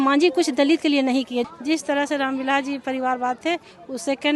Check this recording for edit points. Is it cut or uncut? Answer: cut